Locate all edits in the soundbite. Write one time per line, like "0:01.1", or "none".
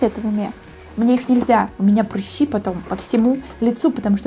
none

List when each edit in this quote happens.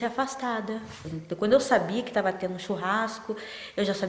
0:01.1

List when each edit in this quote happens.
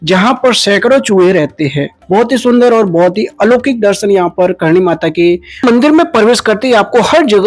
0:01.9
0:05.6

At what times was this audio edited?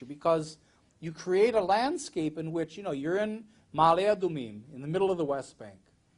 0:04.7

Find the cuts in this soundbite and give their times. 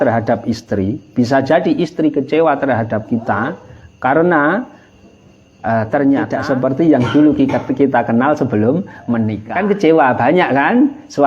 0:06.3
0:09.4

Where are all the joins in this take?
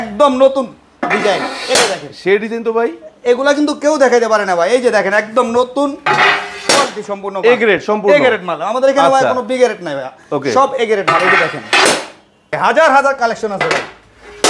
0:12.6

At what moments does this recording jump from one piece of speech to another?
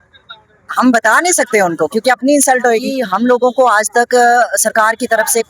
0:03.0

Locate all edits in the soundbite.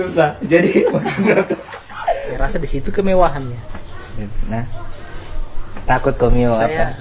0:02.3

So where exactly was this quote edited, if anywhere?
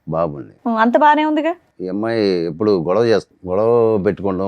0:01.7
0:03.3

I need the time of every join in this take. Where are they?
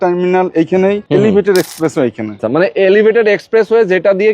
0:01.0
0:02.4

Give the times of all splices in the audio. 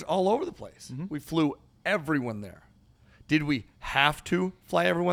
none

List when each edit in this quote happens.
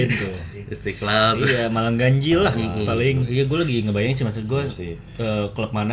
0:03.2

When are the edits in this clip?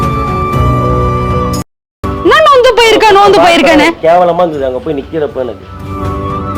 0:02.0

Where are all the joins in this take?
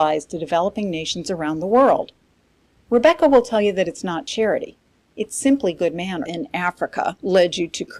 none

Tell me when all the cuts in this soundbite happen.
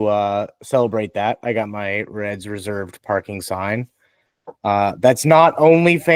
none

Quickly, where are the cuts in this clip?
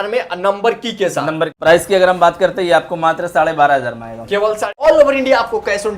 0:01.6
0:04.7

